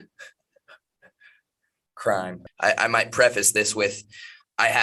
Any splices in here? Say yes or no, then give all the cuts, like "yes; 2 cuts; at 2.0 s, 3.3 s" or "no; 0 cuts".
yes; 1 cut; at 2.4 s